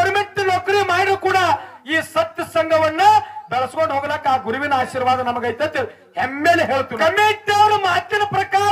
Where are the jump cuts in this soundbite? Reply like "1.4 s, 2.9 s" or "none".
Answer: 6.9 s